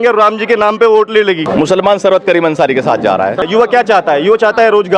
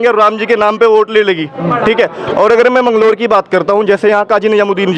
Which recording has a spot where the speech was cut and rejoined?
first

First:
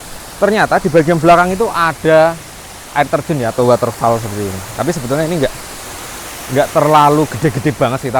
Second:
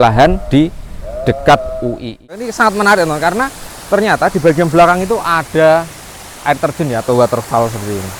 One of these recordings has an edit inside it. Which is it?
second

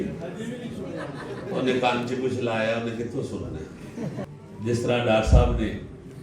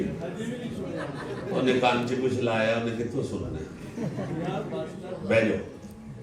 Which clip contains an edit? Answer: first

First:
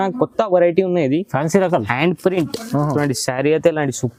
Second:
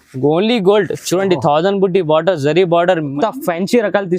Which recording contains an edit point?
second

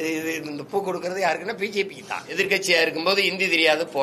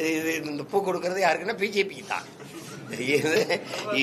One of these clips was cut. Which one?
first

